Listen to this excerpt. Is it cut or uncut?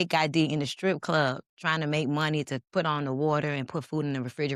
uncut